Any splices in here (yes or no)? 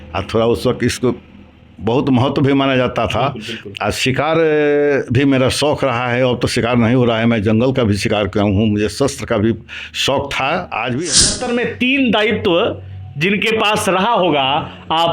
yes